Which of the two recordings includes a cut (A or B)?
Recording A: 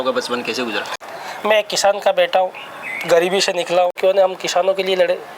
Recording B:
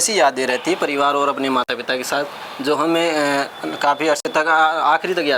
A